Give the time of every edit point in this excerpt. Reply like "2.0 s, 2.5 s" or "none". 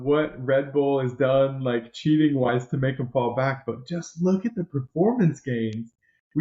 none